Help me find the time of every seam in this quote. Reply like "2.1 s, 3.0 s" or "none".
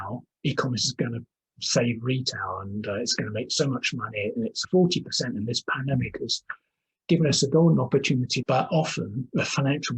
4.6 s, 8.4 s